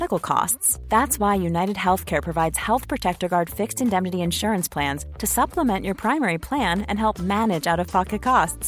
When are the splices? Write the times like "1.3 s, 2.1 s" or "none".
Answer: none